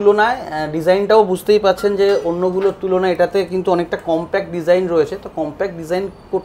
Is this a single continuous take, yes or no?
yes